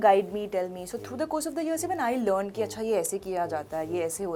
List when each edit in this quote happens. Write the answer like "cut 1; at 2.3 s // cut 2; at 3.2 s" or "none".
none